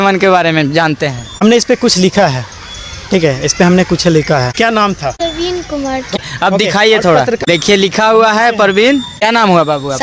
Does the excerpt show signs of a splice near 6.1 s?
yes; 1 cut; at 6.1 s

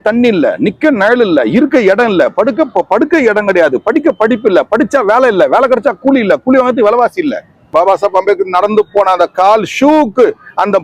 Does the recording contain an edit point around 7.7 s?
yes; 1 cut; at 7.7 s

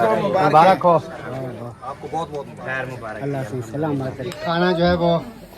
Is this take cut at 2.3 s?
no; 1 cut; at 4.3 s

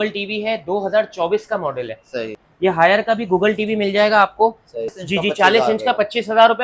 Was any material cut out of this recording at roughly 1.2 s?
no; 2 cuts; at 2.4 s, 4.9 s

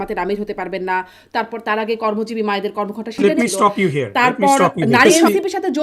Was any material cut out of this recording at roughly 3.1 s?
yes; 2 cuts; at 3.1 s, 5.0 s

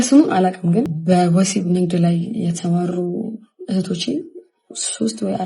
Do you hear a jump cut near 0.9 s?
yes; 1 cut; at 0.9 s

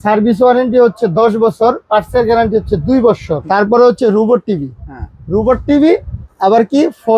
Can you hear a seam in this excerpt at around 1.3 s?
no; 1 cut; at 3.3 s

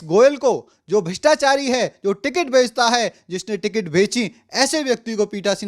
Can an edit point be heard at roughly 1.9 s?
no; 0 cuts

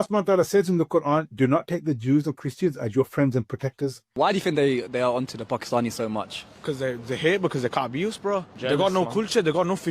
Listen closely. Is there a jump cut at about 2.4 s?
no; 1 cut; at 4.0 s

